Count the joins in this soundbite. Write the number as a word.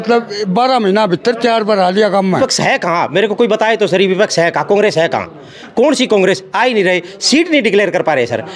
one